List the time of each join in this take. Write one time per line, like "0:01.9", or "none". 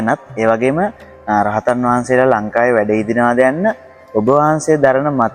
none